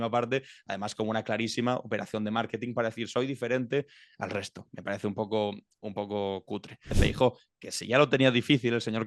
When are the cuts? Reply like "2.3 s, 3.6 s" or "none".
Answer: 6.9 s